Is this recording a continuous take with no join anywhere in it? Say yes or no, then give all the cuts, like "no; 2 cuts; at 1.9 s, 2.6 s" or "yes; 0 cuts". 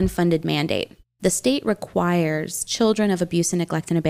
no; 1 cut; at 1.0 s